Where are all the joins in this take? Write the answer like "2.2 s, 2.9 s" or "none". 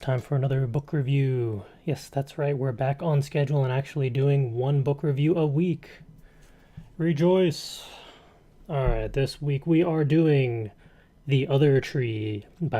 8.6 s